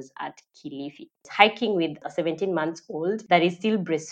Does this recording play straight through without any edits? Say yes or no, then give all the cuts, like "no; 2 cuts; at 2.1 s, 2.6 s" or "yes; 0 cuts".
no; 3 cuts; at 1.2 s, 2.0 s, 3.2 s